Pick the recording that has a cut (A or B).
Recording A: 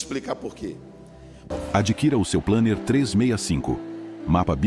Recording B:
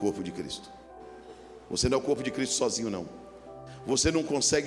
A